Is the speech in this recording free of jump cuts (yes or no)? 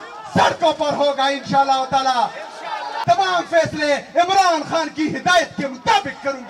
no